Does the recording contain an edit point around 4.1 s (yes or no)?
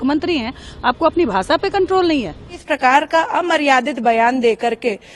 no